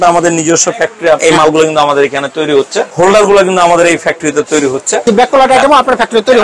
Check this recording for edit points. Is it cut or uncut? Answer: cut